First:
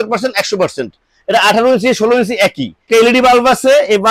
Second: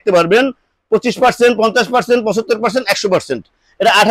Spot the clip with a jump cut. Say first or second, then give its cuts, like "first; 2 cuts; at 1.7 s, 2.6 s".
first; 1 cut; at 2.8 s